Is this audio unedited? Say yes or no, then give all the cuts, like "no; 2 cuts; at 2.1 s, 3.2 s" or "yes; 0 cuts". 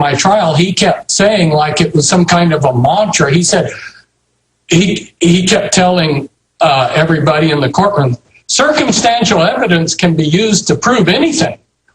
no; 1 cut; at 3.0 s